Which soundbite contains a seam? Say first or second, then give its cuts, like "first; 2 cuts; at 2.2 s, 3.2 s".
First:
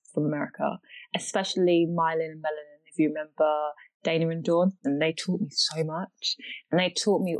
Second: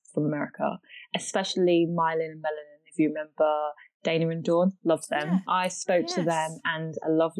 first; 1 cut; at 4.8 s